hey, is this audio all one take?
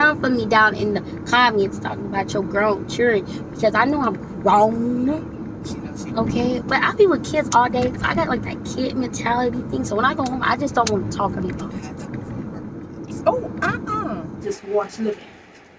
no; 1 cut; at 14.4 s

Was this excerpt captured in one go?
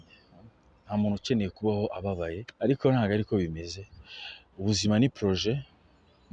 no; 1 cut; at 2.4 s

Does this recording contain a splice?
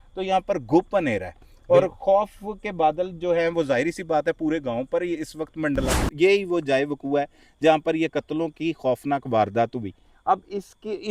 yes; 1 cut; at 5.9 s

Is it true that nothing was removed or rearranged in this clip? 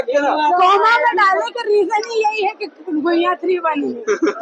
yes; 0 cuts

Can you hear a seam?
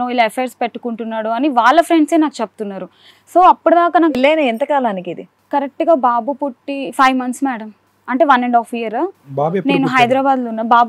no; 0 cuts

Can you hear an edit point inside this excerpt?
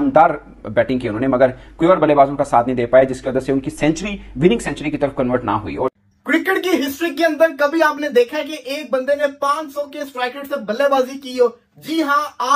yes; 1 cut; at 5.9 s

